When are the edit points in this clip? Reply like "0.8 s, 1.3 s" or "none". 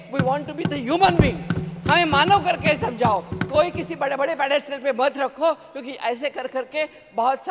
none